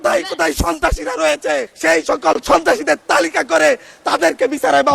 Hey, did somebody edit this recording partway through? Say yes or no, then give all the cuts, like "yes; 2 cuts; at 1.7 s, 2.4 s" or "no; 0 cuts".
yes; 1 cut; at 1.7 s